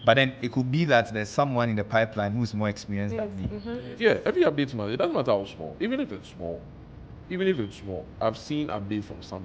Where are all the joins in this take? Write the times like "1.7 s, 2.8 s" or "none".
3.9 s

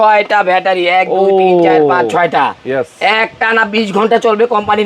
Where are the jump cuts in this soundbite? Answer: none

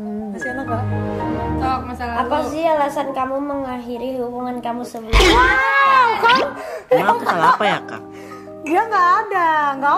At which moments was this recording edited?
1.6 s

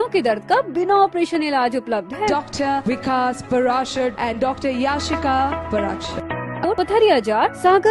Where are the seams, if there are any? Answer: 6.6 s

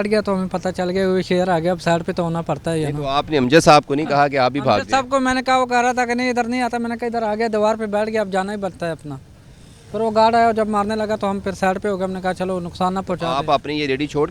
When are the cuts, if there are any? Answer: none

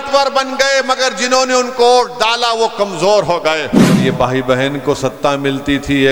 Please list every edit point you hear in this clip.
4.0 s

